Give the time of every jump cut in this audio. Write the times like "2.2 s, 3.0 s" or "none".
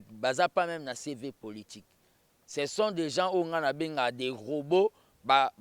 none